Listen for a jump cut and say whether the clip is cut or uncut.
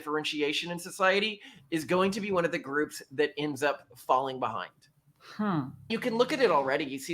cut